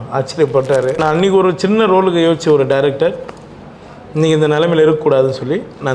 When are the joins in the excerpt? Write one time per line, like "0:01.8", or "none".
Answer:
0:01.0